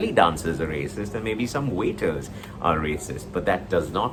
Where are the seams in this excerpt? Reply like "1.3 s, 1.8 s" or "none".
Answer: none